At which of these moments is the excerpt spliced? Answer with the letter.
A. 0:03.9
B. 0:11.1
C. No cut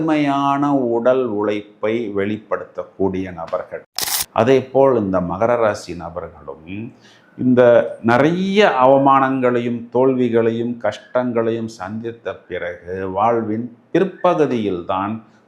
A